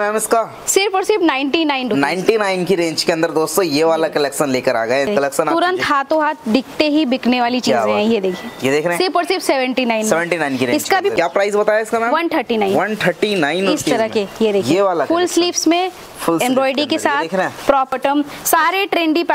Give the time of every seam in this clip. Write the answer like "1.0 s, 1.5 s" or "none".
5.1 s, 11.1 s, 17.9 s